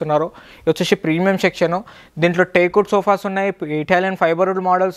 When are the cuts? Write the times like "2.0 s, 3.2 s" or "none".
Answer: none

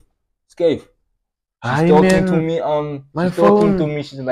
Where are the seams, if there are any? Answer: none

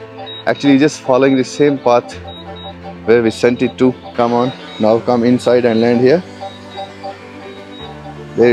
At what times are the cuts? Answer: 4.0 s

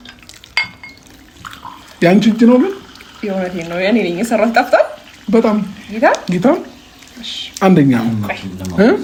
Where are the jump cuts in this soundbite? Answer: none

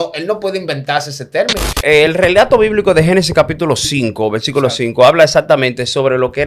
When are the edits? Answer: 1.8 s

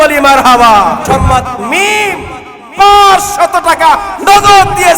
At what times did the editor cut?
1.0 s

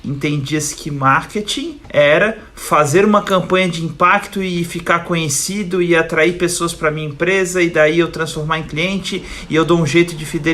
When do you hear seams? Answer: 1.8 s

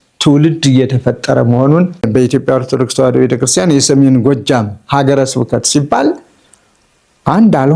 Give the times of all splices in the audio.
2.0 s

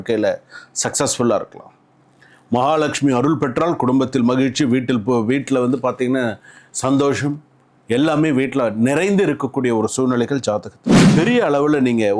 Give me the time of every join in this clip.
10.9 s

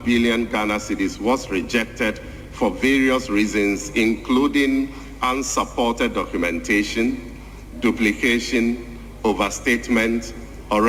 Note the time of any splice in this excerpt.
none

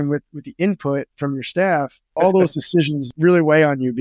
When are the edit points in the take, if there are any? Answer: 2.1 s, 3.1 s

